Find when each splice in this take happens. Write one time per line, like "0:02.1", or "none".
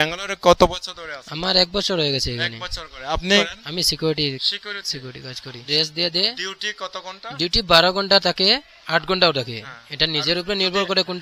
0:03.6
0:05.6